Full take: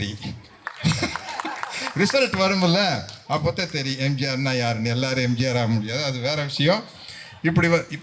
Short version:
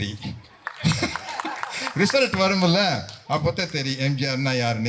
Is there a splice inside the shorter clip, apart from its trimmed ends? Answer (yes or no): no